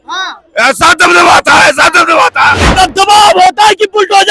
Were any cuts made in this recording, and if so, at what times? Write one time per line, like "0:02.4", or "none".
0:02.7